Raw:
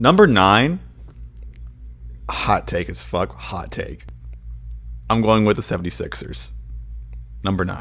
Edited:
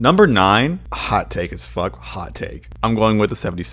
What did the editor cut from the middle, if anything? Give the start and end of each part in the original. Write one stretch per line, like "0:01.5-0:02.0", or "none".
0:00.9-0:02.3
0:04.0-0:04.9